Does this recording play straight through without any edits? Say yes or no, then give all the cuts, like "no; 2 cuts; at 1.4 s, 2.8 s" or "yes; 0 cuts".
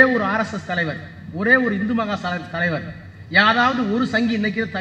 yes; 0 cuts